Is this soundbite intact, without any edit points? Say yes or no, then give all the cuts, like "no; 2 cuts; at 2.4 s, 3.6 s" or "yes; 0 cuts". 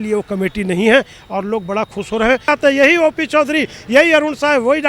no; 1 cut; at 2.5 s